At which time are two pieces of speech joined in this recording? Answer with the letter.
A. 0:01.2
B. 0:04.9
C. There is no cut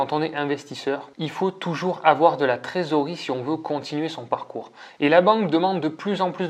A